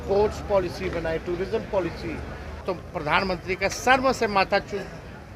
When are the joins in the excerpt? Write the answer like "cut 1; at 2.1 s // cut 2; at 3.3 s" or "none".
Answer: cut 1; at 2.6 s